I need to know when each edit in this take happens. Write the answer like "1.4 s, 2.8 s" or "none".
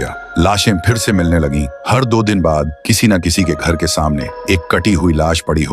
none